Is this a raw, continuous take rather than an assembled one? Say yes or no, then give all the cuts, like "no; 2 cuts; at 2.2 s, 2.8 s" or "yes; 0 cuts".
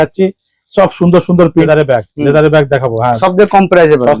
no; 2 cuts; at 1.7 s, 3.2 s